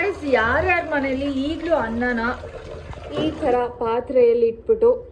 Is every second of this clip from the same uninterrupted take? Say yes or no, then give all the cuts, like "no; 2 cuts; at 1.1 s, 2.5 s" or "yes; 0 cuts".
yes; 0 cuts